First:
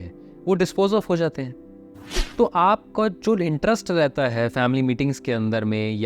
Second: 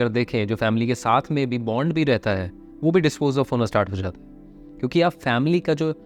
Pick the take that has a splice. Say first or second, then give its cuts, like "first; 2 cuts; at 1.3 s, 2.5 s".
first; 1 cut; at 2.2 s